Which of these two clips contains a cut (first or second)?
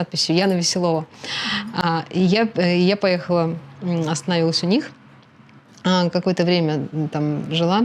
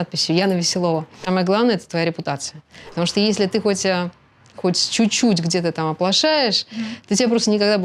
second